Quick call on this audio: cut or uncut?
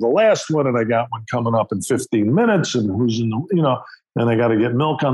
uncut